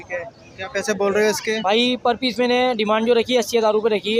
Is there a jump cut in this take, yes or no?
no